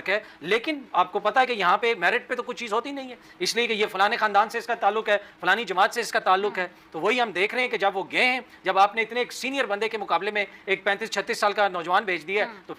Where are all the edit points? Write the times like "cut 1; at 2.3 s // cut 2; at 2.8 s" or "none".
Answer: none